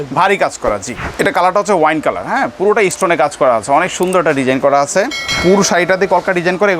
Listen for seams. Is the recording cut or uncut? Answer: cut